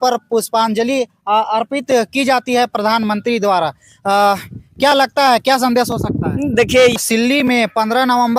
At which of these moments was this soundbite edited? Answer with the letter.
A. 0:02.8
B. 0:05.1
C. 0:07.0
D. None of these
C